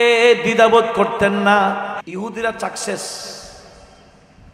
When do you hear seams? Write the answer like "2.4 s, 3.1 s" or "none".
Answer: 2.0 s